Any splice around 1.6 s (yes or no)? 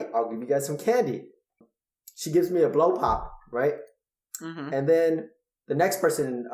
yes